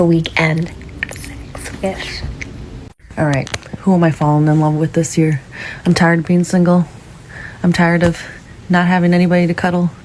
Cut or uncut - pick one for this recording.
cut